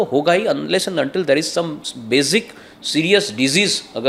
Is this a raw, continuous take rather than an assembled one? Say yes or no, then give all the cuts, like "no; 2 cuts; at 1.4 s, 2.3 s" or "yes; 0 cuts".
yes; 0 cuts